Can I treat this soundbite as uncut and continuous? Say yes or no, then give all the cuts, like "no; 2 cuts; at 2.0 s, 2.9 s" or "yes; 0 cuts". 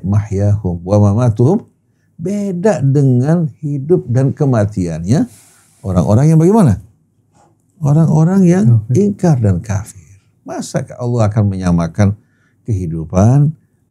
yes; 0 cuts